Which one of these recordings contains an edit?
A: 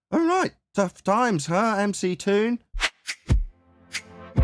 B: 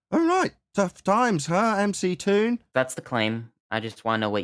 B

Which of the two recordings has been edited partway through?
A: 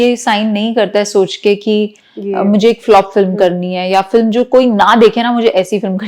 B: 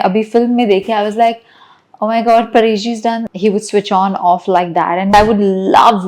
B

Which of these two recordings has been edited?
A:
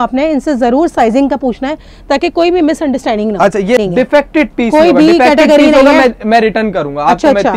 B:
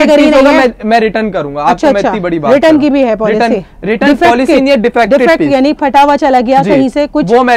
A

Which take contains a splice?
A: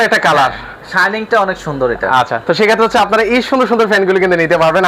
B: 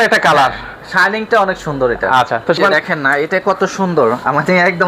B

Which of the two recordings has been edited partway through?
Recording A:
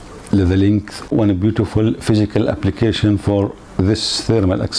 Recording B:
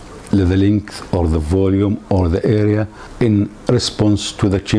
A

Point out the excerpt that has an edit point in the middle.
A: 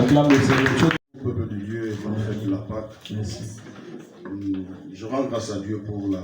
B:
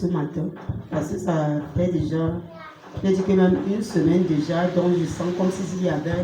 A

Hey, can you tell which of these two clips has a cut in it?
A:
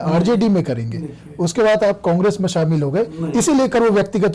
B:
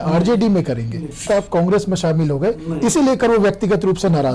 B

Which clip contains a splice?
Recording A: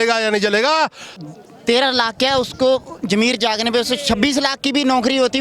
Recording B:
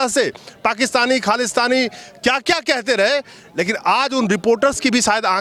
A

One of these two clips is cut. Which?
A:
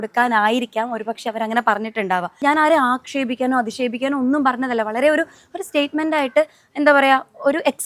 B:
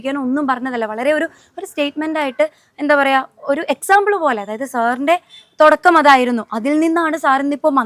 A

